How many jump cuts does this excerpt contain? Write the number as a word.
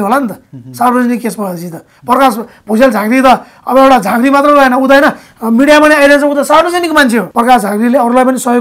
one